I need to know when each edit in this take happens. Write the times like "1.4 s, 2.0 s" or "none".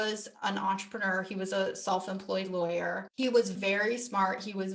none